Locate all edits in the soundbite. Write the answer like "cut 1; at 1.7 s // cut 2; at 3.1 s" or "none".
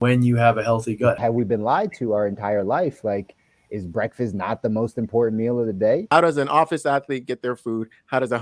cut 1; at 1.2 s // cut 2; at 6.1 s